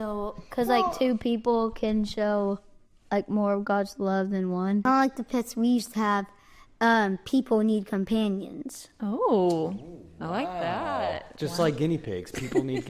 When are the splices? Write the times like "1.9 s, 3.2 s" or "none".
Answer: 4.8 s